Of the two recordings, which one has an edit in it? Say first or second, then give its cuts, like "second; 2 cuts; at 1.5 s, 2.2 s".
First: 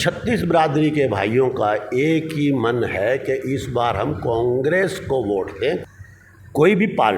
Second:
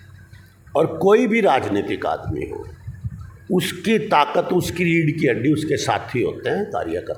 first; 1 cut; at 5.8 s